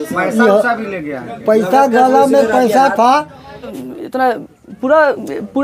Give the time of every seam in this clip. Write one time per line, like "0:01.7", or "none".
0:03.7